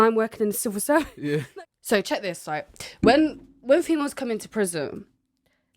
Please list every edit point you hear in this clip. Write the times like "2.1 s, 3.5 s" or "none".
1.5 s